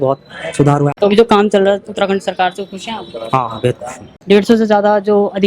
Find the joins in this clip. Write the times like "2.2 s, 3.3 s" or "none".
0.9 s, 4.2 s